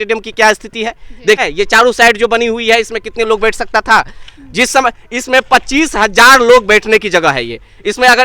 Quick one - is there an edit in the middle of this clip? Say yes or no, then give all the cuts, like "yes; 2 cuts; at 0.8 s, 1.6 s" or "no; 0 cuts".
yes; 1 cut; at 1.4 s